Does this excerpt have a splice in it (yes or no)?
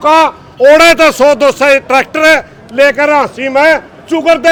no